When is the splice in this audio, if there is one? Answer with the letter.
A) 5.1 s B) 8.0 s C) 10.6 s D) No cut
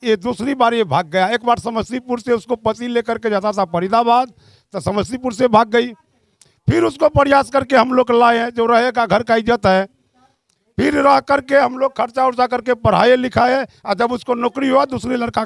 D